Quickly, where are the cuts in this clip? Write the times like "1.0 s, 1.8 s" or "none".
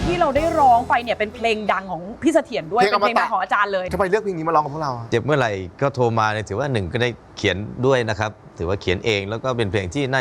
3.9 s